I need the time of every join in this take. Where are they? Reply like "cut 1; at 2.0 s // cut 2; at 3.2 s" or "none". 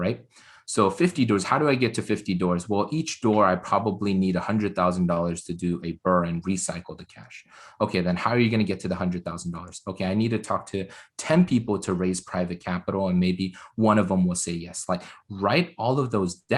none